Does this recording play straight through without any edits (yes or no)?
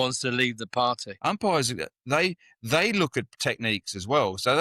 no